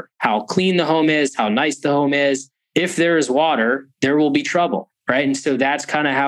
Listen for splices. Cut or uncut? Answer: uncut